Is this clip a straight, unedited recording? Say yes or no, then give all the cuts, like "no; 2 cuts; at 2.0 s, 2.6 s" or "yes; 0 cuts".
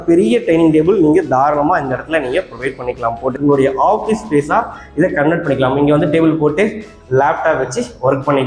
no; 1 cut; at 3.4 s